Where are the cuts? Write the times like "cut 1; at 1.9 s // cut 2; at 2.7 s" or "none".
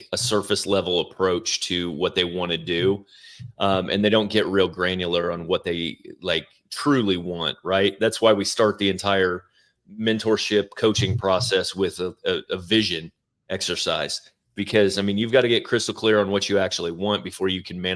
none